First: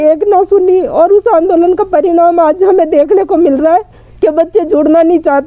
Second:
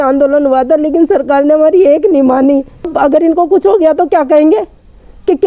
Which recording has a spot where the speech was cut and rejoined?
second; 1 cut; at 2.9 s

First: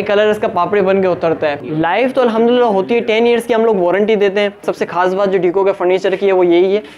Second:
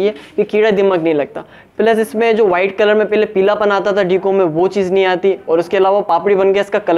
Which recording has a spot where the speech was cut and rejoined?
first; 2 cuts; at 1.6 s, 4.7 s

